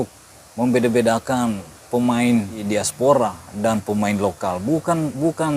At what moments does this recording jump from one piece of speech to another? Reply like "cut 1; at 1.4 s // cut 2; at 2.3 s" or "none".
cut 1; at 2.6 s